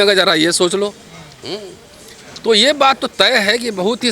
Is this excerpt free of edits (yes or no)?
yes